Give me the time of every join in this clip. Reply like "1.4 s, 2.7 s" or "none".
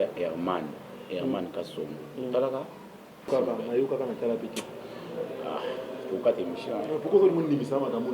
3.3 s